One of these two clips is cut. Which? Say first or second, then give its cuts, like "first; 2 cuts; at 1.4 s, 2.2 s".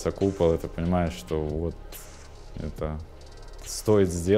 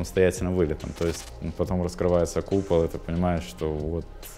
second; 1 cut; at 1.2 s